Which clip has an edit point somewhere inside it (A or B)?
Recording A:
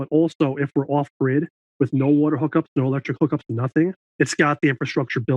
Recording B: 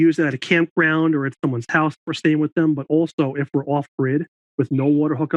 A